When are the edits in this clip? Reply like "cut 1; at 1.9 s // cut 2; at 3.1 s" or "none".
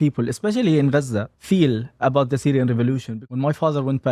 cut 1; at 1.3 s // cut 2; at 3.1 s